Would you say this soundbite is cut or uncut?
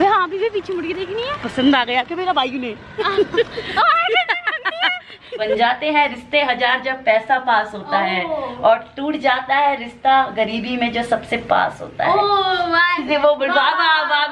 cut